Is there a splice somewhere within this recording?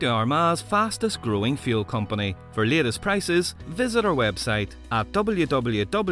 no; 0 cuts

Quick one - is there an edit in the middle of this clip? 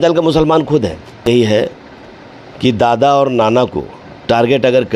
yes; 1 cut; at 1.3 s

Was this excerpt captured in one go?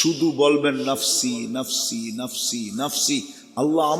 yes; 0 cuts

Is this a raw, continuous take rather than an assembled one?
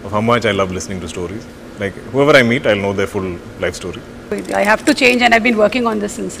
no; 1 cut; at 4.4 s

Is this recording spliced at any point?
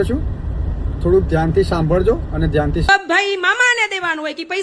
yes; 1 cut; at 2.9 s

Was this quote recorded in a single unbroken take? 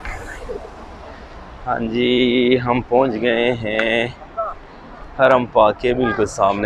yes; 0 cuts

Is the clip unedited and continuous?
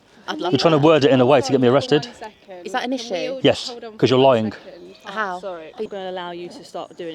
no; 1 cut; at 5.9 s

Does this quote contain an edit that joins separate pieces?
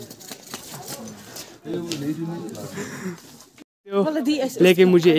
no; 0 cuts

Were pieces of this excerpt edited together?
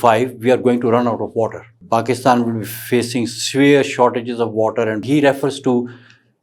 yes; 2 cuts; at 1.7 s, 5.0 s

